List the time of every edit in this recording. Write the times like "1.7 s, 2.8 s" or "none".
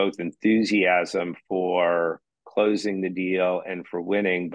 none

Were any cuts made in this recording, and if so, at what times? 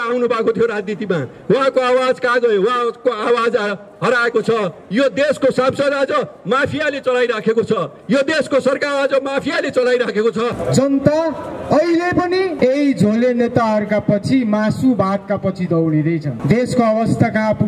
10.6 s, 12.6 s, 16.3 s

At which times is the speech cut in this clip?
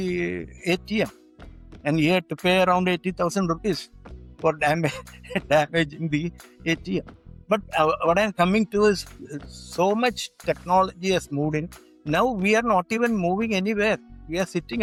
none

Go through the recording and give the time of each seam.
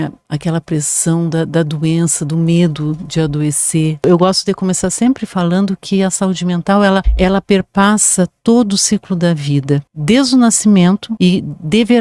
4.0 s, 7.1 s, 9.9 s, 11.1 s

